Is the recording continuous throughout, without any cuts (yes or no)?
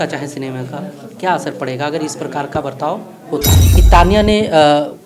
no